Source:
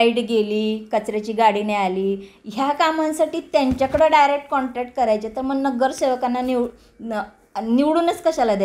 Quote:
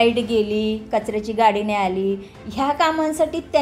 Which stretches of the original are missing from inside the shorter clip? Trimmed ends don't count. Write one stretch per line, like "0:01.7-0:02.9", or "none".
none